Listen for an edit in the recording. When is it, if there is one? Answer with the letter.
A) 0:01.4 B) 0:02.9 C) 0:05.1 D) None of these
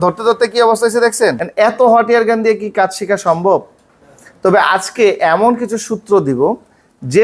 A